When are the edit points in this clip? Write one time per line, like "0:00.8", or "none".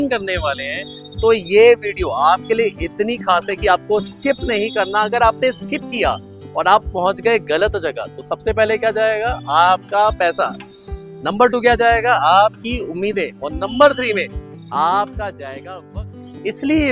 0:16.0